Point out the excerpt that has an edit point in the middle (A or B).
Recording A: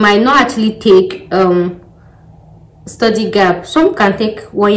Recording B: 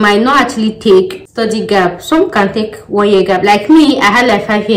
B